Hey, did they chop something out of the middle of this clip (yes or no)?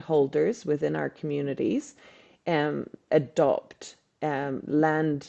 no